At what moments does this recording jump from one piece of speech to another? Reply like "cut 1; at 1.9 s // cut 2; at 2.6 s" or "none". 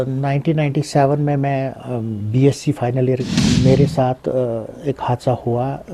cut 1; at 3.3 s